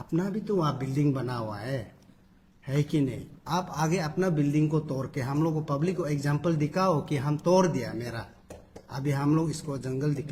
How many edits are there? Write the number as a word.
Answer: zero